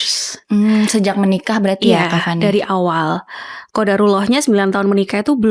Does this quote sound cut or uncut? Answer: uncut